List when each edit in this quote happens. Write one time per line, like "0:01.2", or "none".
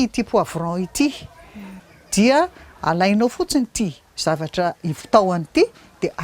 0:01.8